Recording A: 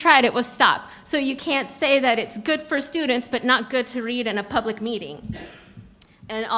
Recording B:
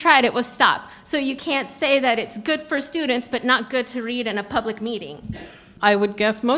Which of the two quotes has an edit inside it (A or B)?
B